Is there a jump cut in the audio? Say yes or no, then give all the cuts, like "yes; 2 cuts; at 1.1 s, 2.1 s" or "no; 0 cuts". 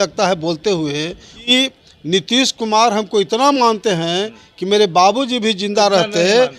yes; 1 cut; at 1.5 s